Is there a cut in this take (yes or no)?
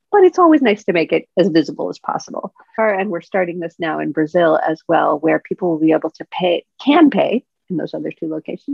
yes